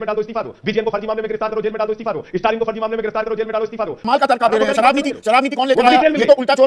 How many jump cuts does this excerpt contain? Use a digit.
1